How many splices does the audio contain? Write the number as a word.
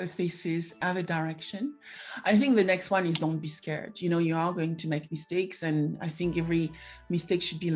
zero